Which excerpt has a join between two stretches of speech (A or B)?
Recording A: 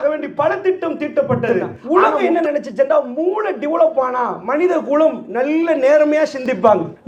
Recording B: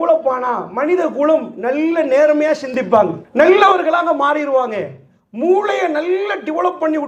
A